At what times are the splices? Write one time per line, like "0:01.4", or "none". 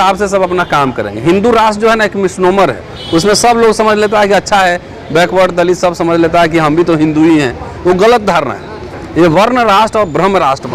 none